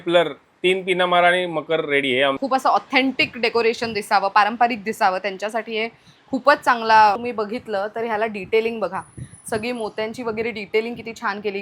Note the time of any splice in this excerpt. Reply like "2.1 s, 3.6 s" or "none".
2.4 s, 7.2 s